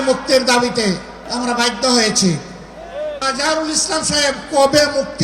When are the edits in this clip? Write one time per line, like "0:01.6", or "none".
0:01.2
0:03.2